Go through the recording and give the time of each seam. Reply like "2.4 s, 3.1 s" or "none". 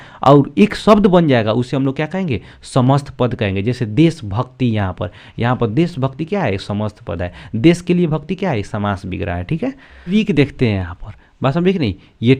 10.1 s